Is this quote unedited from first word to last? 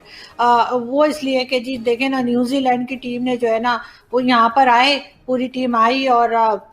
yes; 0 cuts

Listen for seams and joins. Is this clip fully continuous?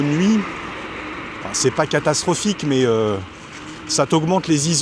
yes; 0 cuts

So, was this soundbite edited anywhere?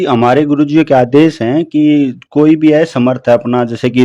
no; 0 cuts

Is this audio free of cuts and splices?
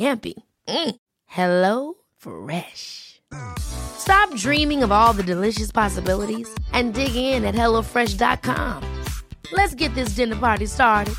yes; 0 cuts

